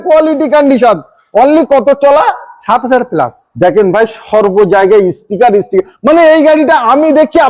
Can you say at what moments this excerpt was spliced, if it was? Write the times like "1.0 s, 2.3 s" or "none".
none